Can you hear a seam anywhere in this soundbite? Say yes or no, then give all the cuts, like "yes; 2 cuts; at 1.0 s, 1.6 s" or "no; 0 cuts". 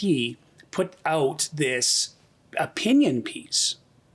no; 0 cuts